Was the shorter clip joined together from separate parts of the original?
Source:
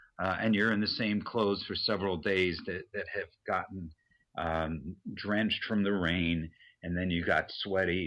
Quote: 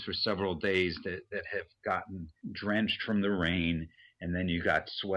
yes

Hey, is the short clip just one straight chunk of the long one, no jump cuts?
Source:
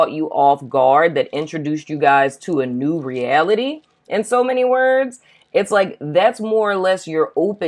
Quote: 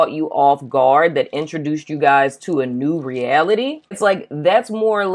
no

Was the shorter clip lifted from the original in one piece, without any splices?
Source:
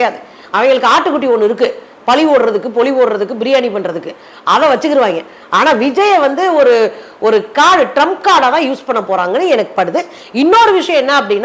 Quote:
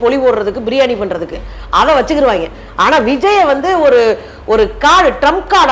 yes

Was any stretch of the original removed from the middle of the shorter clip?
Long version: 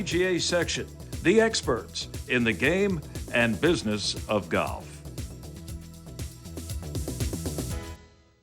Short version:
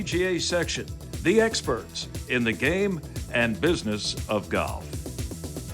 yes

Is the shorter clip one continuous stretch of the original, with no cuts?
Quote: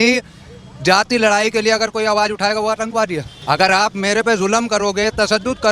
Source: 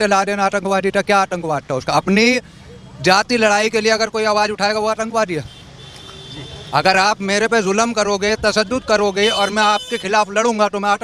no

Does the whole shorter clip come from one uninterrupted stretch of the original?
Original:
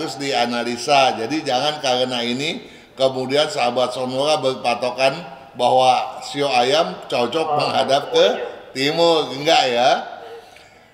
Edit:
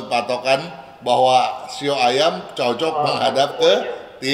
yes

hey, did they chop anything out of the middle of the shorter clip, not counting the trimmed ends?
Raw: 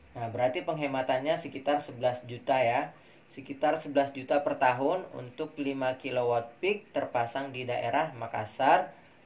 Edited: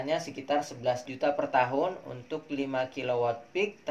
yes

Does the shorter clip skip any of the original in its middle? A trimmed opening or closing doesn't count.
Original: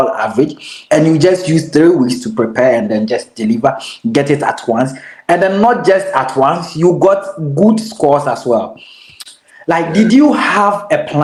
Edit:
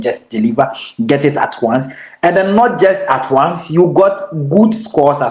no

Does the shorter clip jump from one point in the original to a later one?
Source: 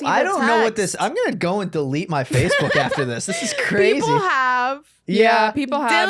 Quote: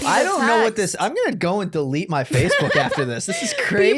no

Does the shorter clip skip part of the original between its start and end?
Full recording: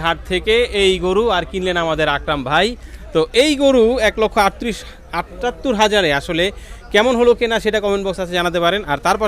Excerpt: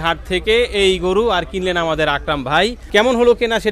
yes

